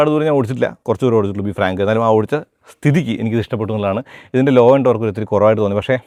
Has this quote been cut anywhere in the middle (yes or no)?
no